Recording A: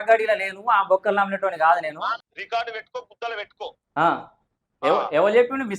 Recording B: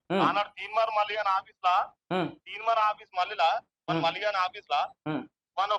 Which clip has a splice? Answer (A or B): A